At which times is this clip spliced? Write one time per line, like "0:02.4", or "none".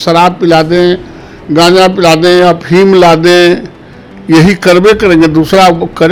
none